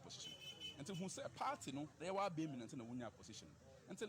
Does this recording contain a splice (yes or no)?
yes